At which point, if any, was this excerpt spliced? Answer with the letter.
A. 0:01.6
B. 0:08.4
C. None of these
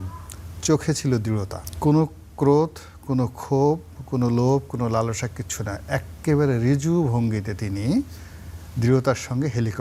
A